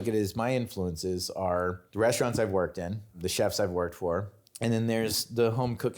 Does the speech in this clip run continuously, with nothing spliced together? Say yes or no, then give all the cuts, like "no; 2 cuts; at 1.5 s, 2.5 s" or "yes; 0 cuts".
no; 3 cuts; at 1.8 s, 3.2 s, 4.4 s